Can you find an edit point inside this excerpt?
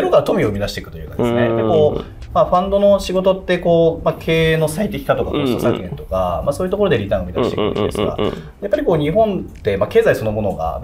no; 0 cuts

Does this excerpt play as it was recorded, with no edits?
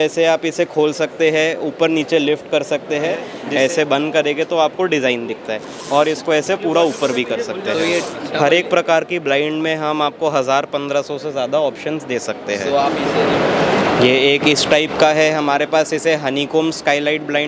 no; 3 cuts; at 3.3 s, 8.2 s, 13.0 s

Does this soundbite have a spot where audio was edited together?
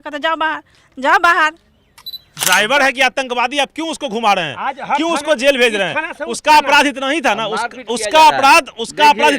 yes; 1 cut; at 2.3 s

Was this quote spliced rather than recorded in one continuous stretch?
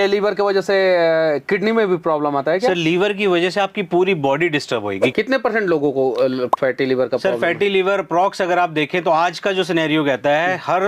yes; 1 cut; at 5.1 s

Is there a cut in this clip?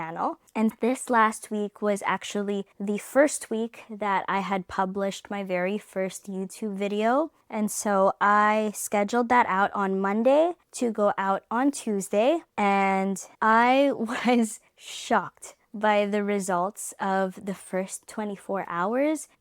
no; 0 cuts

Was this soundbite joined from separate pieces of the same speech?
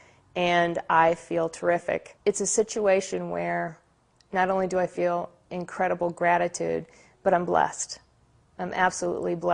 yes; 1 cut; at 2.1 s

